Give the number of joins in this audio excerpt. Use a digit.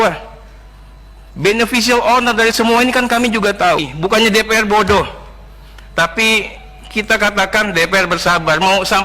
1